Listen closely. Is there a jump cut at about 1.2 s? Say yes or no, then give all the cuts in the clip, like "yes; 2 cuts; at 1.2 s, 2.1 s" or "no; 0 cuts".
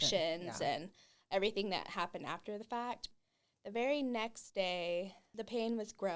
no; 2 cuts; at 3.0 s, 5.3 s